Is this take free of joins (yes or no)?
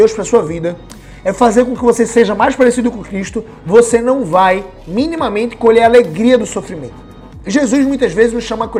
yes